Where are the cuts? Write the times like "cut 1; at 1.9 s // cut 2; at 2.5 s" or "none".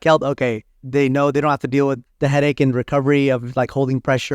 cut 1; at 0.9 s // cut 2; at 2.1 s

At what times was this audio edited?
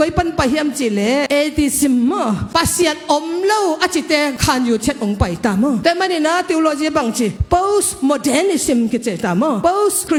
none

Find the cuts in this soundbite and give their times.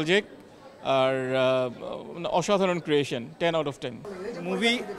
none

